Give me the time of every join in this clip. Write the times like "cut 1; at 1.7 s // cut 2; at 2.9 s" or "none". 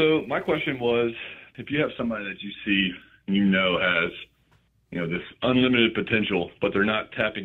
cut 1; at 1.4 s